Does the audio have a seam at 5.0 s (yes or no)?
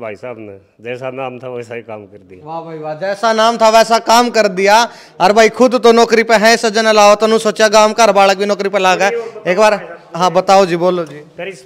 no